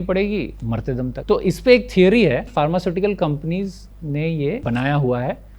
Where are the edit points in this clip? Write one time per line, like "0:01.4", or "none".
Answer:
0:01.2
0:02.5
0:04.6